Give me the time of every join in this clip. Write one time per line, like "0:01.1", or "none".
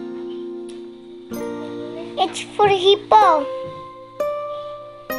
none